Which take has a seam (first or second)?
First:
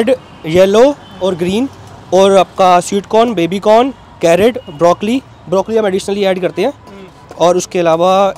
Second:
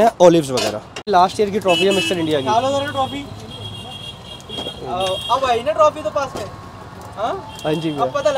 second